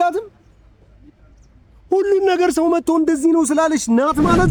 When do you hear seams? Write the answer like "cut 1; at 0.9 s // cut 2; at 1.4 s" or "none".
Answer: none